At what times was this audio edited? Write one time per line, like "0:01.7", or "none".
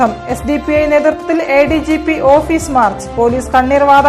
none